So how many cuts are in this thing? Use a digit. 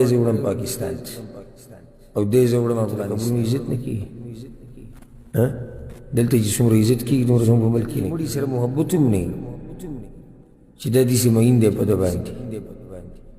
2